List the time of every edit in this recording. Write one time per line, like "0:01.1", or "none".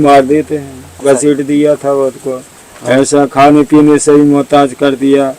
0:01.0